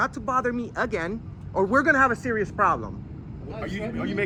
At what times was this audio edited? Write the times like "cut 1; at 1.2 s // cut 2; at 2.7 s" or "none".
none